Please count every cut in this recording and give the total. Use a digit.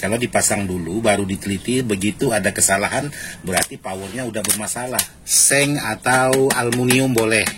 1